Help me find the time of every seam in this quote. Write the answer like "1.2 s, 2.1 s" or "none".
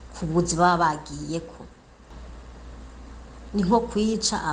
2.1 s